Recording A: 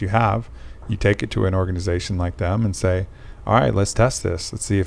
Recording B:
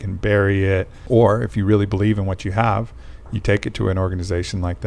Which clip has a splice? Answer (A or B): B